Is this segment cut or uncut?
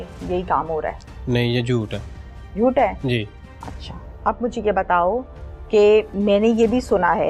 uncut